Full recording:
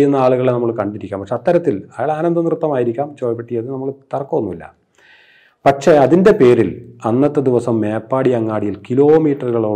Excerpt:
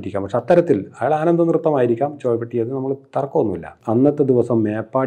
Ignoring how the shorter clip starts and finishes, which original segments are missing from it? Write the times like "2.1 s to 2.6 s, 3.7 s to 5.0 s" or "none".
4.7 s to 6.9 s